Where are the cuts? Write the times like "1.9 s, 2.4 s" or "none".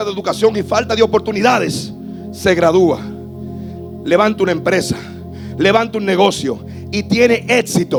none